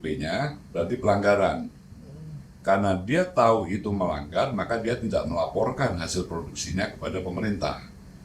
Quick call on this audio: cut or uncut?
uncut